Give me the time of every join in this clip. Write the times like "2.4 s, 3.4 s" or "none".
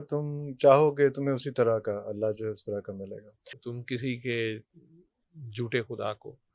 3.6 s